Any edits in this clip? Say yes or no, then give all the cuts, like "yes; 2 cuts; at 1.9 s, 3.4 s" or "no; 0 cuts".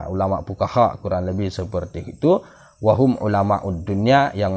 no; 0 cuts